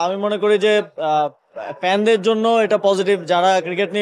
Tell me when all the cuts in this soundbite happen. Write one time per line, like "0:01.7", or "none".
none